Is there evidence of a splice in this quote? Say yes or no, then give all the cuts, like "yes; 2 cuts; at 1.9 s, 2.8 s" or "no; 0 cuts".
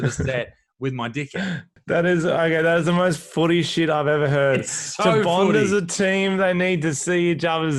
yes; 1 cut; at 1.7 s